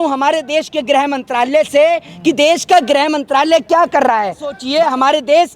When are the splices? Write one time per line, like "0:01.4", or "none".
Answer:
0:04.5